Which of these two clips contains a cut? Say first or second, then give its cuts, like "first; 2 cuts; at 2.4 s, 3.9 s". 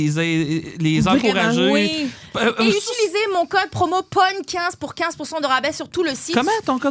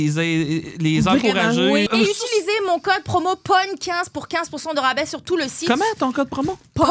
second; 1 cut; at 1.9 s